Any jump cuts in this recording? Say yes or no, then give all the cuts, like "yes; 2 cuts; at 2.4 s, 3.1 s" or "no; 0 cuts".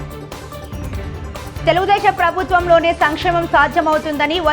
yes; 1 cut; at 1.5 s